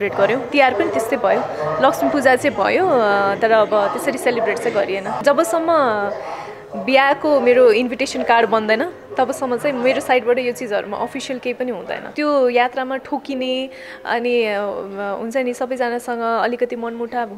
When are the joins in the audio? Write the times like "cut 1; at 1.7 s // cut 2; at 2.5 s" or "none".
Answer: cut 1; at 5.2 s // cut 2; at 12.1 s